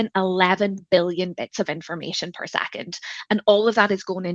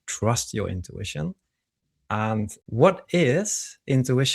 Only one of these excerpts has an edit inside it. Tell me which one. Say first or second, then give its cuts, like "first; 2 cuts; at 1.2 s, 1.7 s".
second; 1 cut; at 2.6 s